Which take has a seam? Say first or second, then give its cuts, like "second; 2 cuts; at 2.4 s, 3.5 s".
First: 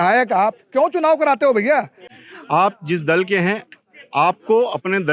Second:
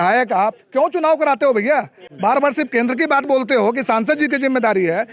first; 1 cut; at 2.0 s